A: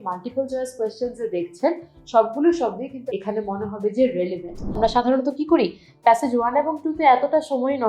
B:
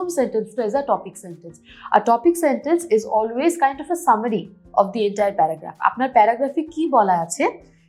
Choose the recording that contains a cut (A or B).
A